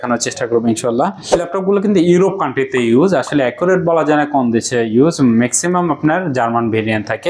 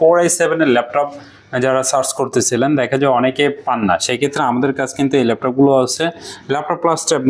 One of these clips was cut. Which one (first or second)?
first